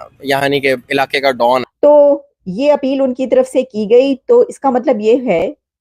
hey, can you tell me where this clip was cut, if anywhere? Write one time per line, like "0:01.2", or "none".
0:01.7